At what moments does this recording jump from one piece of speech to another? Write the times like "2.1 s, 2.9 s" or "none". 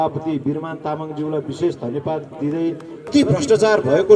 3.1 s